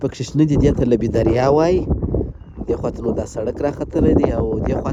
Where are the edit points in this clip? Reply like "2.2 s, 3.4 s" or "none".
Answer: none